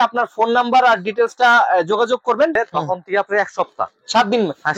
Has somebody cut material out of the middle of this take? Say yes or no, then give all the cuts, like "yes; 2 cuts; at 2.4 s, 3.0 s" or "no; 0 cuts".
yes; 1 cut; at 2.5 s